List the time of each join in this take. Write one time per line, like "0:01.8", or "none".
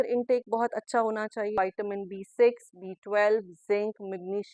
0:01.6